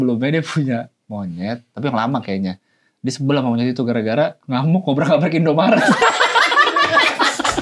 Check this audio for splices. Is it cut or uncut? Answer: uncut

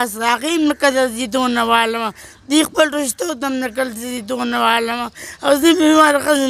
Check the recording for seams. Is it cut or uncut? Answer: uncut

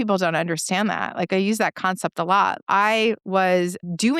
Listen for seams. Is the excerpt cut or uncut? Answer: cut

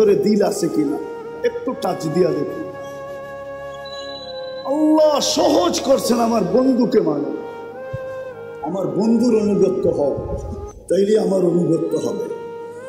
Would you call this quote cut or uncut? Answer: cut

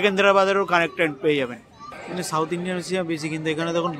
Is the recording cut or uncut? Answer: cut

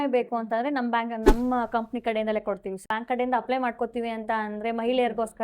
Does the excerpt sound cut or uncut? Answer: cut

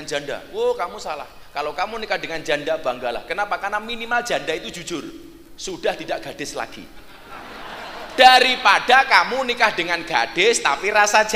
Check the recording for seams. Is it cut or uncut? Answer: uncut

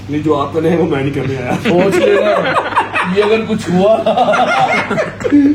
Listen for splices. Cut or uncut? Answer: uncut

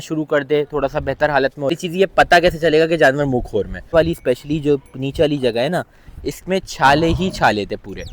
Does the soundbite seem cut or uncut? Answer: cut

